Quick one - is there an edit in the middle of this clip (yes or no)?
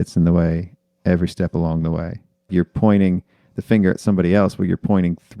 yes